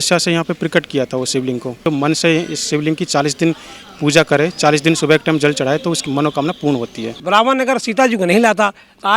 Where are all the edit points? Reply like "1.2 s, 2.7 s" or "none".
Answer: 1.9 s, 6.0 s, 7.2 s